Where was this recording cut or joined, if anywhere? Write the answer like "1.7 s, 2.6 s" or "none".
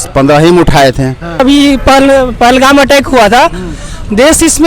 1.4 s